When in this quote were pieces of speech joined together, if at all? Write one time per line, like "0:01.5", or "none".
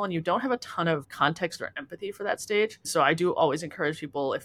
0:01.0
0:02.8